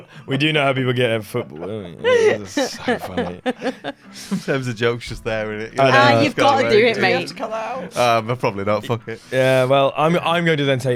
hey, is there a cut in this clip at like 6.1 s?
no; 0 cuts

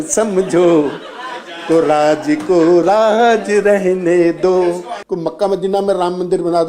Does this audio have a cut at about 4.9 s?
yes; 1 cut; at 4.9 s

